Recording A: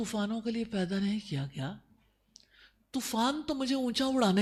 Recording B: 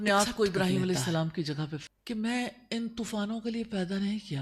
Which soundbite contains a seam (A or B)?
B